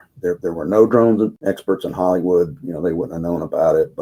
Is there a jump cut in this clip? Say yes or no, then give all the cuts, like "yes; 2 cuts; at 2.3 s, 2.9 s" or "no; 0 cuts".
no; 0 cuts